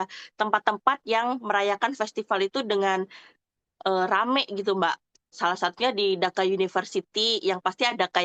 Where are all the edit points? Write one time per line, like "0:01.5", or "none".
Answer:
none